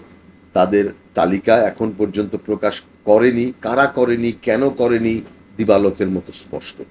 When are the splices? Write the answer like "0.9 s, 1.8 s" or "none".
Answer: 5.4 s